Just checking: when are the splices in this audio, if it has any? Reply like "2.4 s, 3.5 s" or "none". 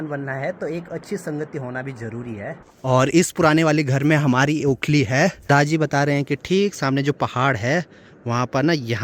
2.5 s, 5.5 s